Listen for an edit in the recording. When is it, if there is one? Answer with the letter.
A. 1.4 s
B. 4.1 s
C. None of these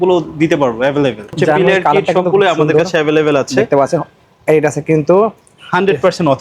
A